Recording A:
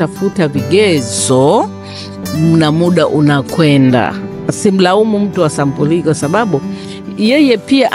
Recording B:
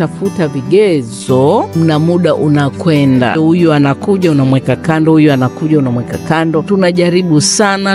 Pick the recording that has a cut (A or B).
B